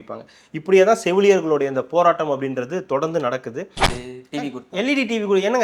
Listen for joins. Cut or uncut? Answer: cut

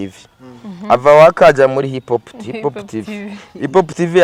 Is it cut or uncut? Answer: uncut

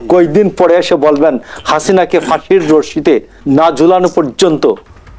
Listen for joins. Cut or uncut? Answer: cut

